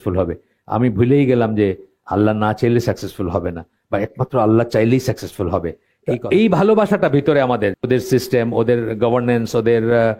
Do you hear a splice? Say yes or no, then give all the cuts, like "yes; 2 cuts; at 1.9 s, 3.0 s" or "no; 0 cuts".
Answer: yes; 2 cuts; at 5.9 s, 7.8 s